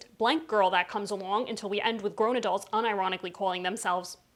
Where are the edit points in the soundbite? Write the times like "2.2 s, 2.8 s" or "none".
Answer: none